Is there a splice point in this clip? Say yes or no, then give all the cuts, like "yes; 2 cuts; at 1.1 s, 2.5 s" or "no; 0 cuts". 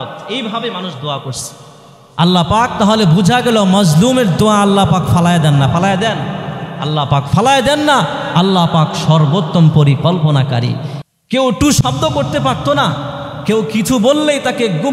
yes; 1 cut; at 10.9 s